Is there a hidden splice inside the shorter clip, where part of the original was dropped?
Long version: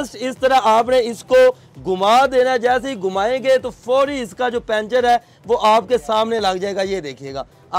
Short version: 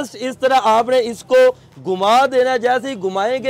no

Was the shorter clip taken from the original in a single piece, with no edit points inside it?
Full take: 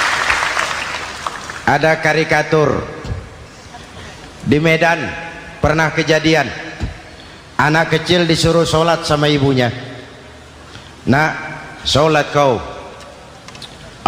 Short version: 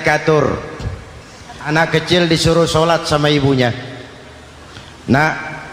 no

